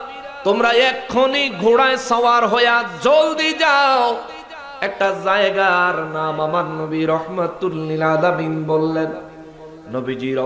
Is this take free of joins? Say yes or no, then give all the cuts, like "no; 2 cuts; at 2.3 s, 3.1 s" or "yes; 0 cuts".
yes; 0 cuts